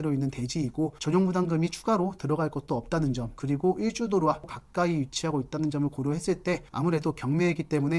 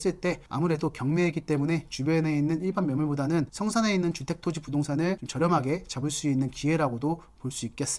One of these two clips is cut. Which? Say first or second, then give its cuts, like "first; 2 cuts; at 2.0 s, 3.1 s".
first; 2 cuts; at 1.0 s, 4.5 s